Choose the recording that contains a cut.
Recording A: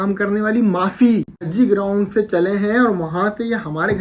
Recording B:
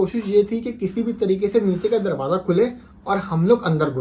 A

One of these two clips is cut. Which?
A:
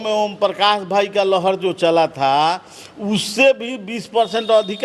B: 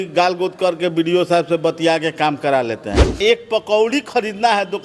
B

